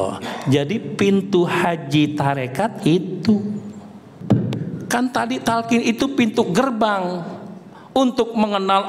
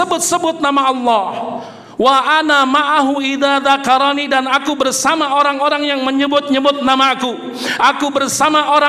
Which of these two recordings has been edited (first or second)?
first